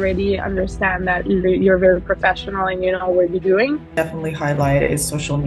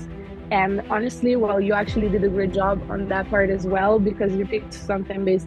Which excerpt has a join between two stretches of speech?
first; 1 cut; at 3.9 s

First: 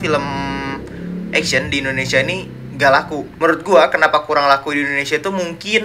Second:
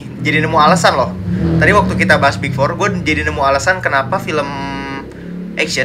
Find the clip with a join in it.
first; 1 cut; at 3.3 s

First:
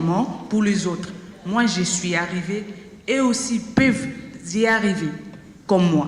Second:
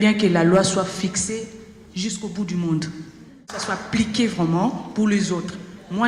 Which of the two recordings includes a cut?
second; 1 cut; at 3.5 s

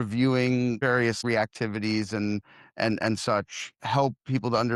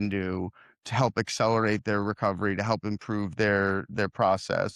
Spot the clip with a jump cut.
first; 1 cut; at 0.9 s

